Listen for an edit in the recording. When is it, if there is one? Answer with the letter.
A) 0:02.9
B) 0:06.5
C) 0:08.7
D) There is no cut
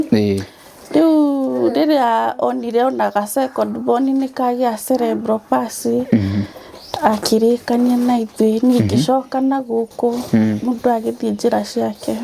D